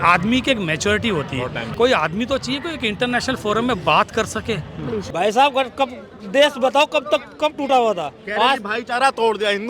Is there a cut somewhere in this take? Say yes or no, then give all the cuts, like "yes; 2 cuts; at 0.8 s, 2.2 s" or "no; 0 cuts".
yes; 2 cuts; at 1.6 s, 5.1 s